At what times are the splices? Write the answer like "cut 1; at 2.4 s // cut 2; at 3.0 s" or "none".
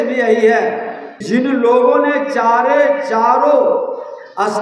cut 1; at 1.2 s